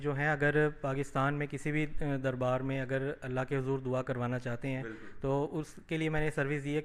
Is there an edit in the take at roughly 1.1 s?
no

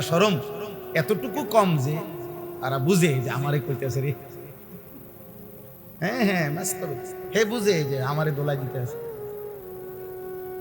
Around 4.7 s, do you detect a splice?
no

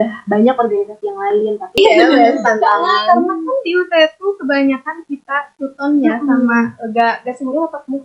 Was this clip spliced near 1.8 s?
yes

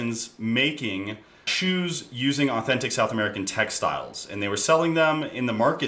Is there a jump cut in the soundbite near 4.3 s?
no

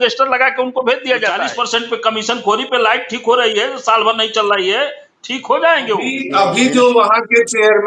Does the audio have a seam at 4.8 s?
no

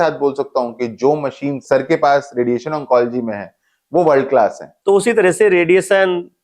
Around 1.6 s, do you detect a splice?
yes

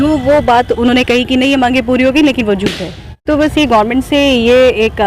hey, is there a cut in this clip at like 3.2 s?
yes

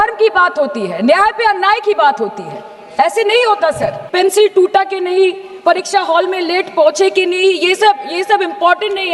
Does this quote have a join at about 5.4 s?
no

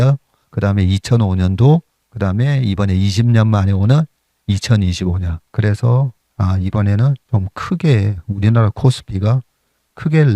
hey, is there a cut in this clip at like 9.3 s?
no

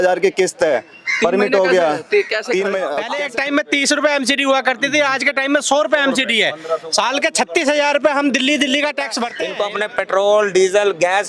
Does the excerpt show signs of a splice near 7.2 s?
no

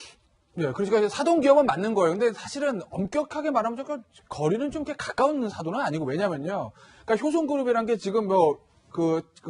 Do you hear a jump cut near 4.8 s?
yes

